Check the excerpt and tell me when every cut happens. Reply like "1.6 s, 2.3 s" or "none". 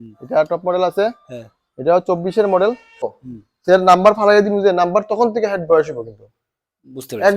3.0 s